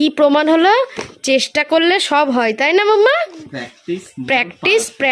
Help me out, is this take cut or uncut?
uncut